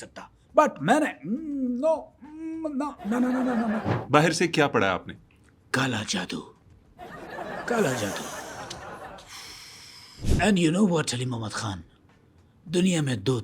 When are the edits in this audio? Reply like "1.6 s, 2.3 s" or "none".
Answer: 3.9 s